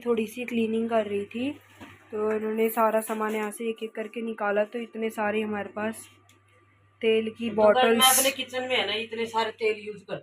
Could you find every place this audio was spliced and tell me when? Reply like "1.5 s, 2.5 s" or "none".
none